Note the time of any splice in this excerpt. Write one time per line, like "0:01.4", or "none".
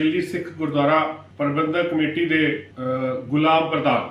0:01.2
0:02.7

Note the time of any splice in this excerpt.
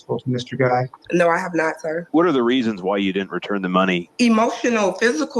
0:01.0
0:02.1
0:04.1

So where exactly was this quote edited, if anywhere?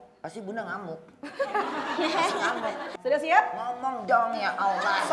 0:02.9

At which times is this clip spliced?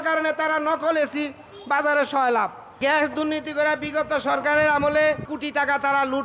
0:05.3

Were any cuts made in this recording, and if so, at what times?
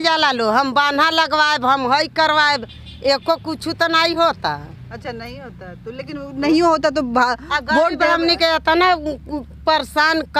none

